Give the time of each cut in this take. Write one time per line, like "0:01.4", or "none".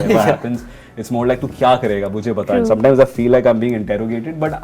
none